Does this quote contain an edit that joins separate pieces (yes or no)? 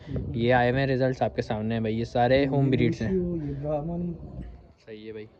no